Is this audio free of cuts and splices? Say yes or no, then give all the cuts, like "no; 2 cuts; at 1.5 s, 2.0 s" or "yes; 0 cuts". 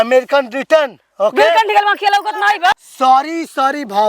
no; 1 cut; at 2.7 s